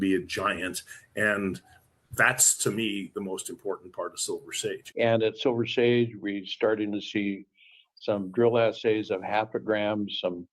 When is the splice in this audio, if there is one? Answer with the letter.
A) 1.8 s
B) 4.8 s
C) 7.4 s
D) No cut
B